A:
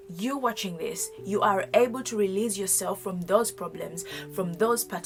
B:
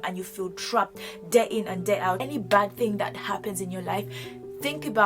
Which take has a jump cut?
B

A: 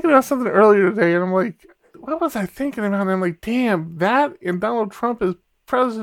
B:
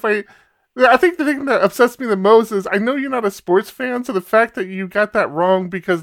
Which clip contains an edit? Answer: A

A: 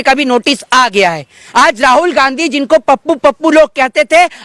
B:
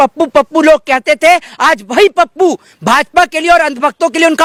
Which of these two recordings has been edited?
A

